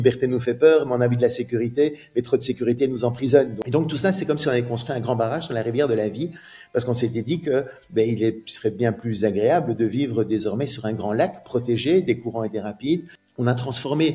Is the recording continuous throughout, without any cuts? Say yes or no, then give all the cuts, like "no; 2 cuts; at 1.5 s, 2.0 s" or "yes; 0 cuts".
no; 2 cuts; at 3.6 s, 13.2 s